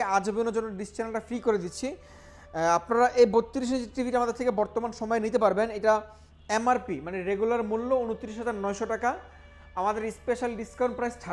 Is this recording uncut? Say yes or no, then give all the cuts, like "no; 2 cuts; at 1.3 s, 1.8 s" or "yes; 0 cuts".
yes; 0 cuts